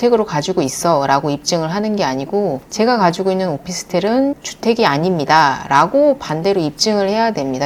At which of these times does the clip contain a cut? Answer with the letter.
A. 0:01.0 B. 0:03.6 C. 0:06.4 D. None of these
D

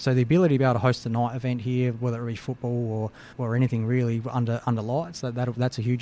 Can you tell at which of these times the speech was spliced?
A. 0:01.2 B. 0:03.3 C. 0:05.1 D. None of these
B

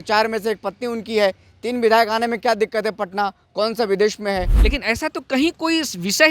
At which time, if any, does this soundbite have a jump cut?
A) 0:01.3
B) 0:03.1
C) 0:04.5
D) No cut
C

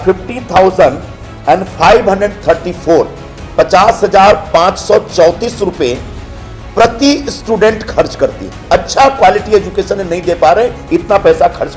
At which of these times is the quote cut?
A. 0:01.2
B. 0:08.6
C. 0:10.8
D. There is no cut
B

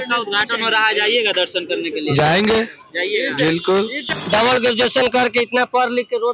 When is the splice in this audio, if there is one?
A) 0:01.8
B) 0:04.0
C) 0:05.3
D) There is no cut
B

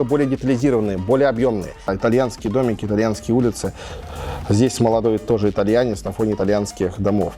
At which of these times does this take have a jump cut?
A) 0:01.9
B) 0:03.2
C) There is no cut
A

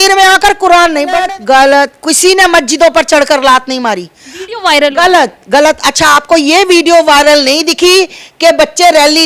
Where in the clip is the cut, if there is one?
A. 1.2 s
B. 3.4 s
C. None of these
A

